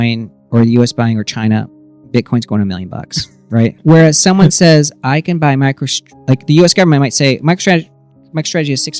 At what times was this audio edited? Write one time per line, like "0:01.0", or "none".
0:03.7